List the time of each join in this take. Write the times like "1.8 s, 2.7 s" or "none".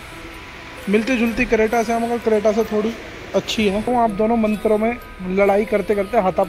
3.9 s

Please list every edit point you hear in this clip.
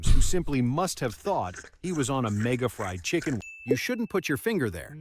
3.5 s

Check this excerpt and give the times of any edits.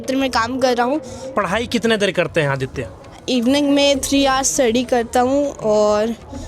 1.3 s, 3.2 s

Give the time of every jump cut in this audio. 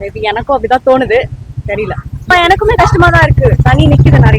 2.3 s

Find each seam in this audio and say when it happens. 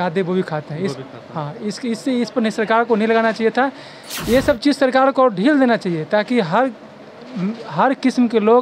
none

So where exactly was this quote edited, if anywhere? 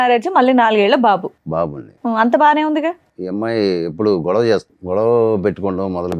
3.1 s, 4.7 s

